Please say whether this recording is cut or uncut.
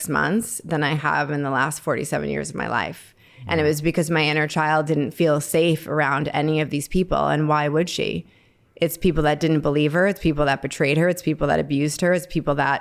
uncut